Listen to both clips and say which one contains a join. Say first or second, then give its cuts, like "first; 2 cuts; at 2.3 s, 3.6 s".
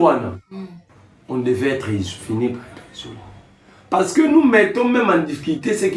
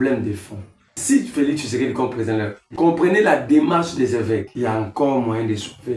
second; 3 cuts; at 1.0 s, 2.6 s, 4.5 s